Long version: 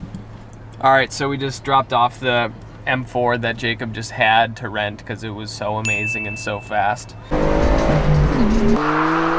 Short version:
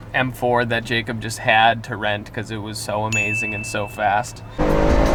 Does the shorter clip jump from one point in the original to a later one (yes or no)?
no